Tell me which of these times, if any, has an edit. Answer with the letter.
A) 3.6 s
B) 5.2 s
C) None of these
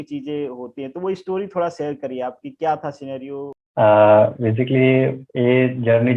C